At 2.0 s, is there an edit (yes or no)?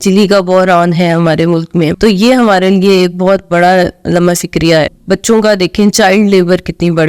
yes